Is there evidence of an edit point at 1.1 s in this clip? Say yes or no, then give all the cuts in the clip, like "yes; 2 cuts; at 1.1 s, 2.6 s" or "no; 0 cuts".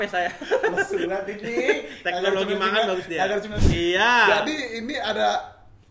no; 1 cut; at 3.6 s